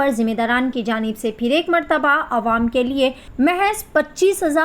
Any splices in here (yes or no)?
yes